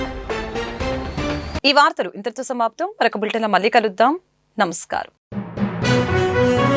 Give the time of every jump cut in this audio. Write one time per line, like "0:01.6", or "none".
none